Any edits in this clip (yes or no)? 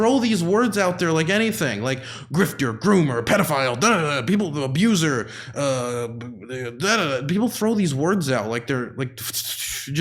no